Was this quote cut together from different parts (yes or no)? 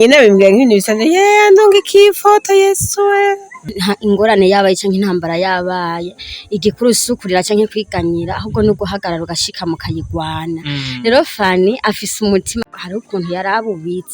yes